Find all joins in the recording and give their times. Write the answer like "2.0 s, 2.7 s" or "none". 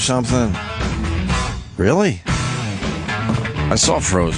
3.2 s